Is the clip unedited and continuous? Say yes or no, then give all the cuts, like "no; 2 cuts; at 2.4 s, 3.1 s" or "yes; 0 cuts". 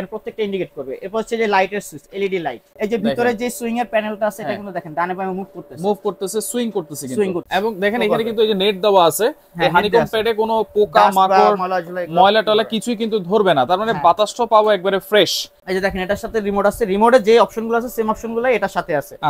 no; 3 cuts; at 2.6 s, 7.5 s, 15.5 s